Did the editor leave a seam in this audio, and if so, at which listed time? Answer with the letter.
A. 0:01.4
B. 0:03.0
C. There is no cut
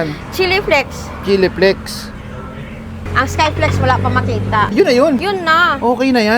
B